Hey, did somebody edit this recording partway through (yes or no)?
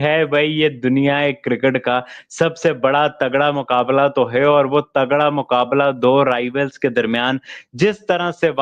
no